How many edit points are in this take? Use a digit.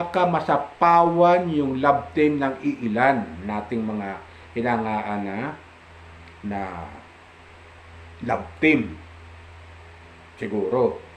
0